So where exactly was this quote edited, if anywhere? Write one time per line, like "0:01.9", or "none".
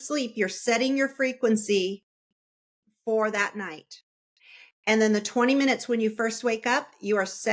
none